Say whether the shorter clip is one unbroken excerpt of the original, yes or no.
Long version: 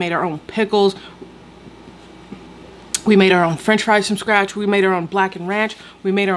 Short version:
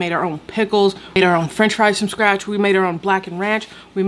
no